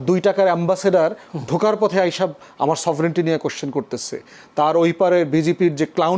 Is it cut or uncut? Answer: uncut